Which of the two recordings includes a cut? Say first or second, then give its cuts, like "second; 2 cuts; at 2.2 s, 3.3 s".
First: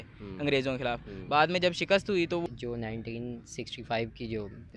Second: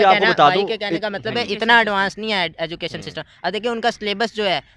first; 1 cut; at 2.4 s